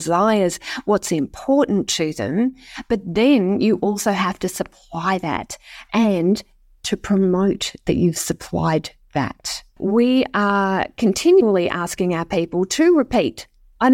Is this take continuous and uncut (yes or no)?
no